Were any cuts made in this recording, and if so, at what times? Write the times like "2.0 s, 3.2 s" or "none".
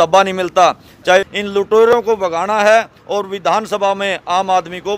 1.3 s